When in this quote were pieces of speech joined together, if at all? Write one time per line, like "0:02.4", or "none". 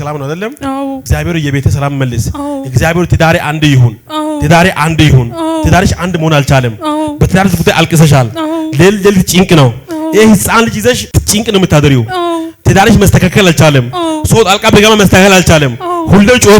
0:01.1
0:11.1